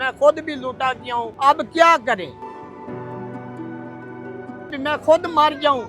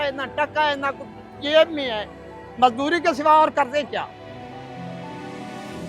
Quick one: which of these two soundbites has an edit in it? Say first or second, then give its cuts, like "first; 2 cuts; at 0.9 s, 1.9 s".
first; 2 cuts; at 1.3 s, 4.7 s